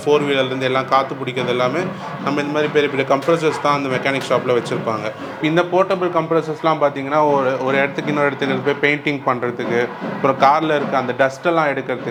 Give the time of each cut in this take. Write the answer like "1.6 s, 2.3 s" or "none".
none